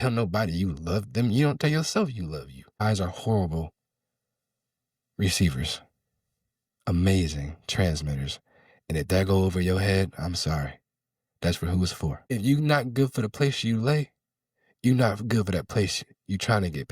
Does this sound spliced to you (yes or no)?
yes